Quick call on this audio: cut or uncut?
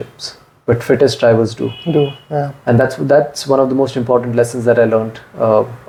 uncut